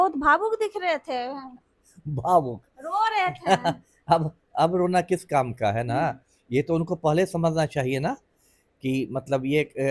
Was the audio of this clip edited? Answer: no; 0 cuts

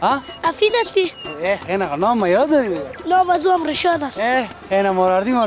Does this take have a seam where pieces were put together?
no; 0 cuts

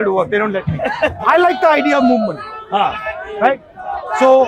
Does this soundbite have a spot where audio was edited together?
yes; 1 cut; at 1.2 s

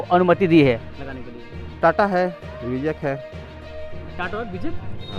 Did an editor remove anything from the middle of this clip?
no; 0 cuts

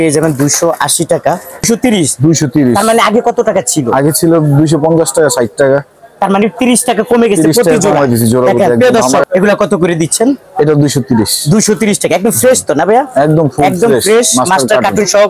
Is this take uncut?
no; 2 cuts; at 1.7 s, 9.2 s

